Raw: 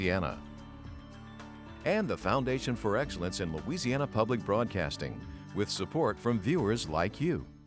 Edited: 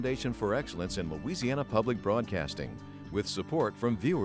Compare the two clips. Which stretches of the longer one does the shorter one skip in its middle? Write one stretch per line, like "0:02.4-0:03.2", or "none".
none